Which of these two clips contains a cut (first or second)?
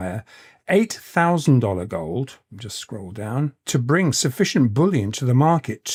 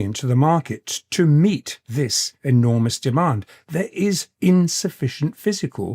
second